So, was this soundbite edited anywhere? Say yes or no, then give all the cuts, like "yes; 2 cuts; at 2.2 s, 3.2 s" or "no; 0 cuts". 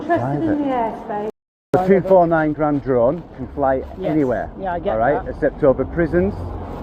yes; 1 cut; at 1.7 s